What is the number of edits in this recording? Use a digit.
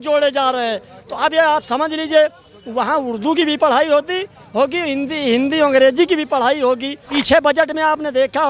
1